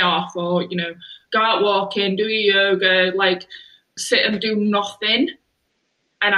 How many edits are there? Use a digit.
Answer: 1